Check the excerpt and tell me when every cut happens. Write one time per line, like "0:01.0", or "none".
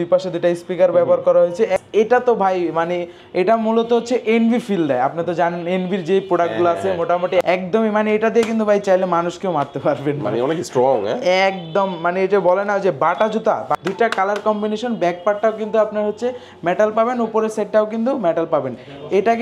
0:01.9
0:07.4
0:13.8